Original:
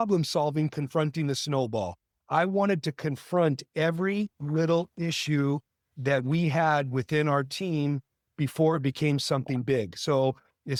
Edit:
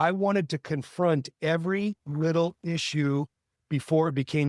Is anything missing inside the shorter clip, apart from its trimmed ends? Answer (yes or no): yes